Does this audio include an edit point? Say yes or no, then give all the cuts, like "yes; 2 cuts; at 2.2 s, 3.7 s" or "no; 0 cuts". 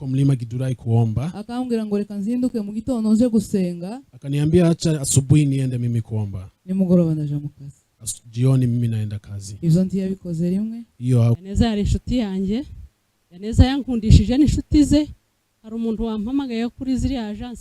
yes; 1 cut; at 11.4 s